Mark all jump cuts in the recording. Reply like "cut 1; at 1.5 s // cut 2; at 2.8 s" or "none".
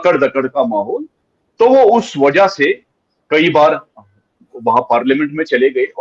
none